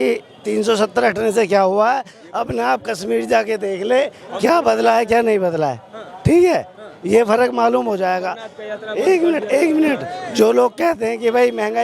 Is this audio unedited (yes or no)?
yes